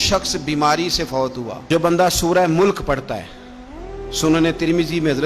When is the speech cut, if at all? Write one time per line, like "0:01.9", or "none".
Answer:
0:01.6